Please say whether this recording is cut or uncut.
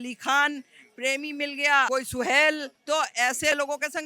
cut